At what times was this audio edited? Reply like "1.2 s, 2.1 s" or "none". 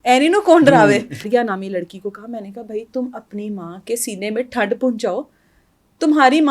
1.3 s